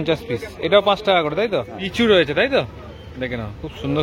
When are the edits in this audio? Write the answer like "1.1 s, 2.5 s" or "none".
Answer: 1.8 s